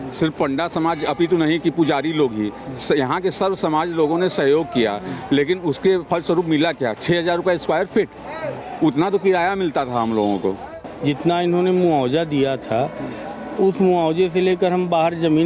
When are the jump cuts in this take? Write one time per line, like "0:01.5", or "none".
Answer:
0:10.8